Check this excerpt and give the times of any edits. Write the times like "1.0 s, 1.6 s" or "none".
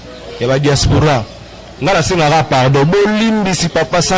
none